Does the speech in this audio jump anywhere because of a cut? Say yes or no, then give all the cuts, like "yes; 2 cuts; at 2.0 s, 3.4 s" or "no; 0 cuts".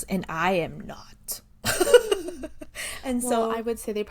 no; 0 cuts